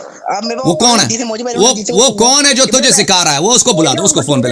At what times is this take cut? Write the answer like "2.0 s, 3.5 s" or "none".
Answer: none